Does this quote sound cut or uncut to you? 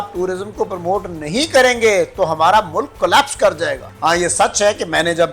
cut